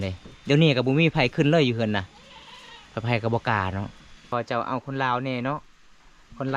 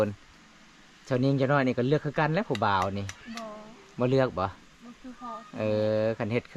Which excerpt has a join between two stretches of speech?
first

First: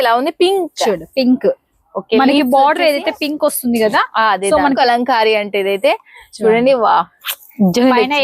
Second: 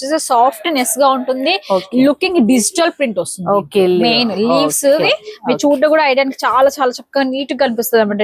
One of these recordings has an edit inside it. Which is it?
first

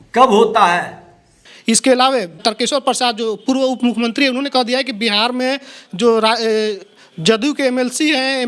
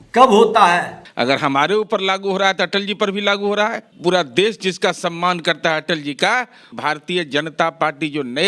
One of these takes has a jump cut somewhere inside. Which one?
second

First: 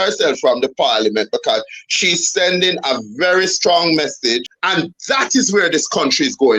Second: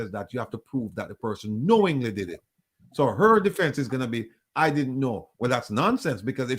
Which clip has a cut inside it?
first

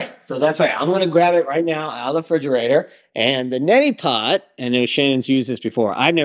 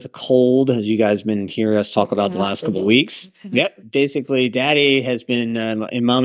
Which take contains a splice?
second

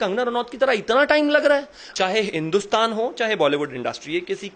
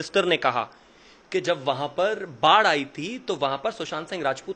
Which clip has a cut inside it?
first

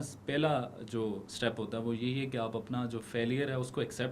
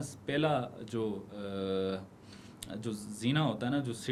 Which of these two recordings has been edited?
first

